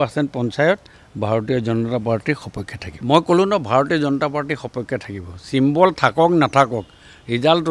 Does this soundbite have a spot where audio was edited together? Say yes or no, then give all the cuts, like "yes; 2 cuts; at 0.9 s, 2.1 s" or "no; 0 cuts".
no; 0 cuts